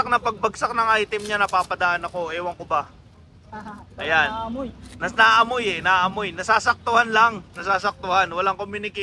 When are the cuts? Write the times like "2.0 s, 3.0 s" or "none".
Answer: none